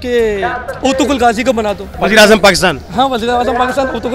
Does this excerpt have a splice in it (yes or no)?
yes